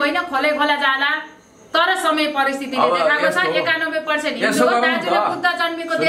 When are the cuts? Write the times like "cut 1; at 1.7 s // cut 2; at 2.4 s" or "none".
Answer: none